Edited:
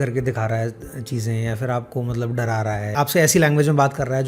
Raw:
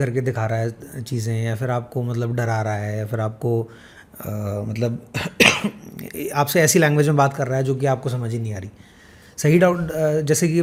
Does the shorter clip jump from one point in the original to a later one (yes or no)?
yes